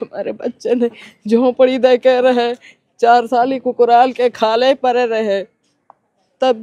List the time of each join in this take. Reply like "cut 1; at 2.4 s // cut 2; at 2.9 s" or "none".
none